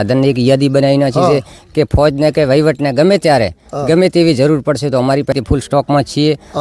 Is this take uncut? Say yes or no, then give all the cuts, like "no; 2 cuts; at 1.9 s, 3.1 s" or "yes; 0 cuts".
no; 1 cut; at 5.3 s